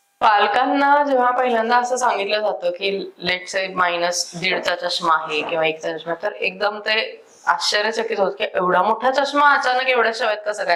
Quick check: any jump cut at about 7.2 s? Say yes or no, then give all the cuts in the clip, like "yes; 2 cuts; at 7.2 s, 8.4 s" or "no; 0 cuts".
no; 0 cuts